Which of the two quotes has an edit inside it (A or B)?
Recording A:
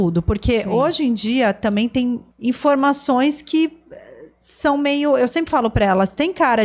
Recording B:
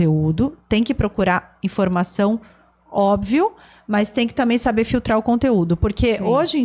A